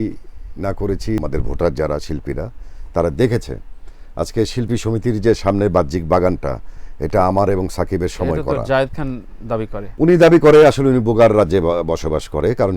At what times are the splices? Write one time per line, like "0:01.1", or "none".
0:01.2
0:09.8